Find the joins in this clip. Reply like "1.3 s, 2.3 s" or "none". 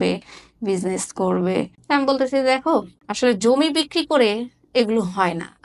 1.8 s, 3.0 s